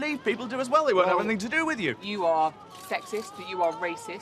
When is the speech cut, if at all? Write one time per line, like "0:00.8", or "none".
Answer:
0:02.0